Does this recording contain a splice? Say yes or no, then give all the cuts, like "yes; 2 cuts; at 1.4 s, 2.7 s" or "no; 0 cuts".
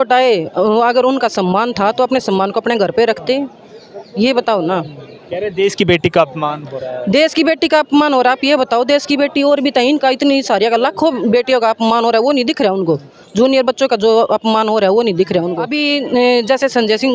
yes; 1 cut; at 15.7 s